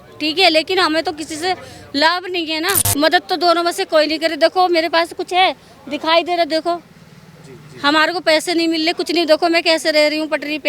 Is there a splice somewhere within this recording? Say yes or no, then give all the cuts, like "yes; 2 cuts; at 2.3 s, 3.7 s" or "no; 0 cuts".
yes; 1 cut; at 2.8 s